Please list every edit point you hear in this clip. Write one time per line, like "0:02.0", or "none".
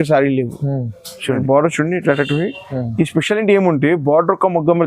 0:01.4